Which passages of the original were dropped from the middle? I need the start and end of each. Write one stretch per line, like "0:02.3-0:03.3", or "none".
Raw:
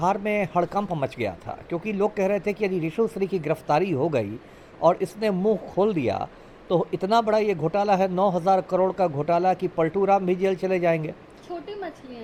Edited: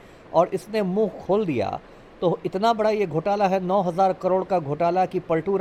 none